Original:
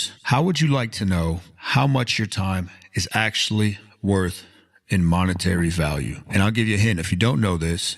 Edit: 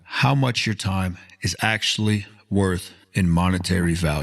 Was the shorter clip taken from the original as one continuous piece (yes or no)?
no